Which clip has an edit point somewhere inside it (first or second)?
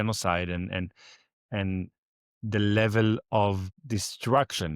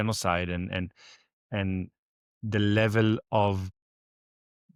first